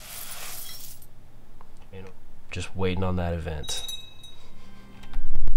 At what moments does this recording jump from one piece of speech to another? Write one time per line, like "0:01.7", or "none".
0:02.1
0:04.7